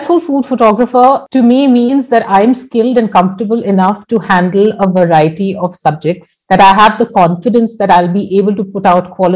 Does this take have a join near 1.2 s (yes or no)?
yes